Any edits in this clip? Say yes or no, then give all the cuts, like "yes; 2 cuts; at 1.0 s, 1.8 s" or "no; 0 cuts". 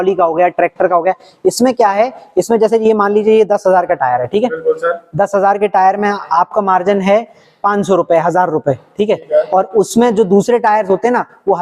no; 0 cuts